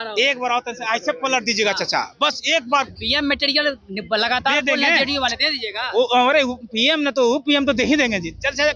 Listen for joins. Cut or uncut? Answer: uncut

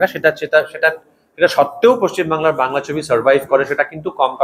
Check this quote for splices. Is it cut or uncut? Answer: uncut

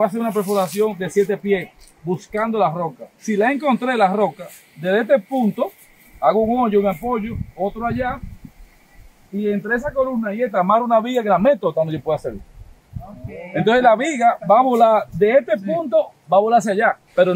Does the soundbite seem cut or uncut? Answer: uncut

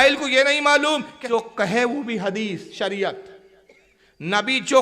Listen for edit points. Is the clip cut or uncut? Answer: cut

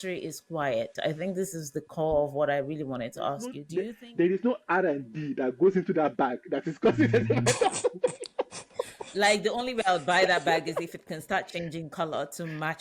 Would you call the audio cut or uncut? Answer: cut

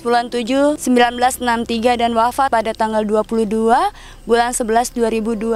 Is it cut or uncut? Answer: cut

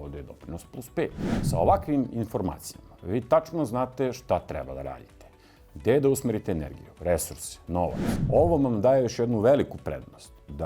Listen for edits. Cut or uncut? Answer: cut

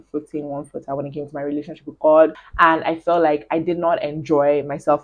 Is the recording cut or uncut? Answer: cut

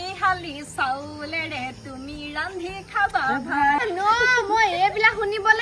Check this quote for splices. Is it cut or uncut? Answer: cut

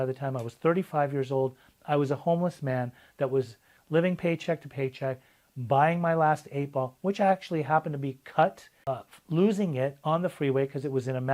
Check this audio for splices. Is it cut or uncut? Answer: cut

